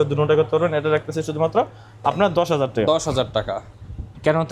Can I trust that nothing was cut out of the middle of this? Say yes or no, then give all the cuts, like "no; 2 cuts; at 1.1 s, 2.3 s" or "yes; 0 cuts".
yes; 0 cuts